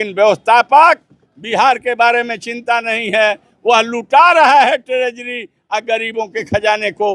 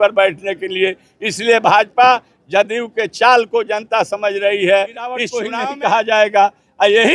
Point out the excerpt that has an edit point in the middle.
second; 1 cut; at 5.4 s

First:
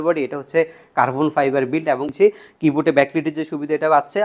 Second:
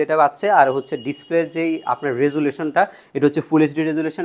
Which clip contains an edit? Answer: first; 1 cut; at 2.1 s

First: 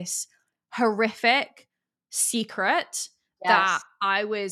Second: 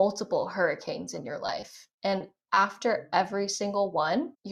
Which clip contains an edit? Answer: first; 1 cut; at 3.3 s

